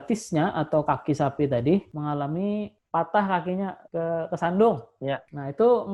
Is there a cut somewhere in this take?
no; 0 cuts

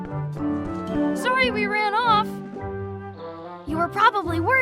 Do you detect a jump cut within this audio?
yes; 1 cut; at 1.3 s

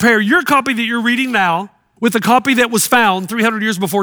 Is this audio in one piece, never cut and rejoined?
no; 1 cut; at 1.4 s

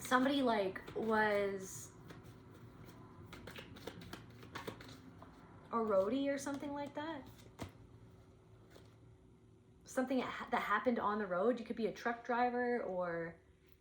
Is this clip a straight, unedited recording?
yes; 0 cuts

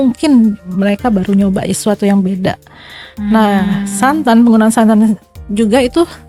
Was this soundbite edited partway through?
no; 0 cuts

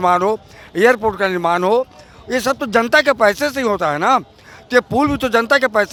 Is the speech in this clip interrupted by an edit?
no; 0 cuts

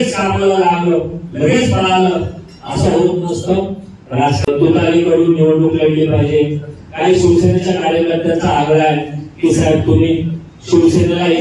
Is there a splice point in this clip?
yes; 1 cut; at 4.5 s

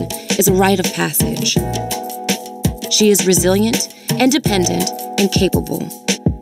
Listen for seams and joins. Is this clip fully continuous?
no; 1 cut; at 1.8 s

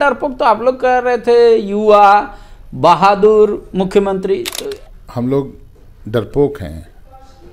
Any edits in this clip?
yes; 1 cut; at 4.6 s

